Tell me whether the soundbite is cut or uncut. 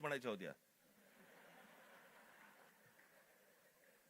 cut